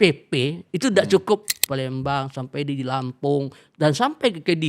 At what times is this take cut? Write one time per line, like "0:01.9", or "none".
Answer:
0:01.6